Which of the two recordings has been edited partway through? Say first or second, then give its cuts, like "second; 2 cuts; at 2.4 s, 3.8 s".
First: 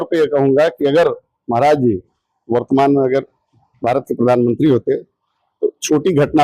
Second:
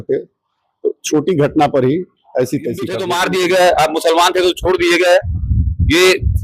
second; 1 cut; at 3.1 s